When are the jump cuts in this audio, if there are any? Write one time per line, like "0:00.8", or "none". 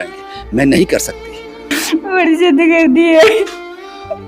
0:01.7